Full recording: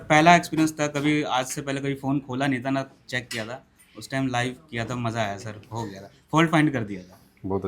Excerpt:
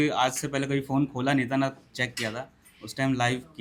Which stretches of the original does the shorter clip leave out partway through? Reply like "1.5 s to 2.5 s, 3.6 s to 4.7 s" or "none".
none